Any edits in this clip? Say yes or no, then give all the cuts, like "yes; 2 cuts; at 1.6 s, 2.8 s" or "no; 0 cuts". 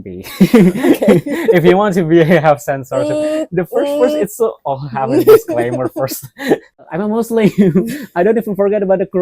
yes; 1 cut; at 6.8 s